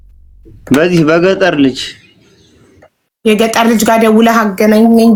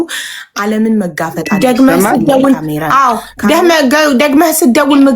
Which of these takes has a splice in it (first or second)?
second